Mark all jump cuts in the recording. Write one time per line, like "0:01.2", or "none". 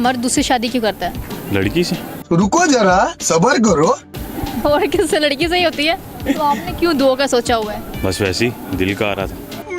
0:06.1
0:07.9